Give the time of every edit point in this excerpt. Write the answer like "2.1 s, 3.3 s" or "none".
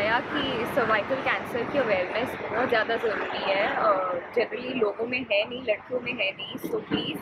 none